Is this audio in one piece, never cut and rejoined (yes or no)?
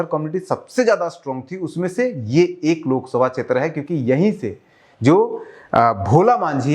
yes